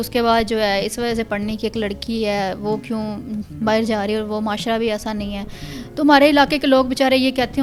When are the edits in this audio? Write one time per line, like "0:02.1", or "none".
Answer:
none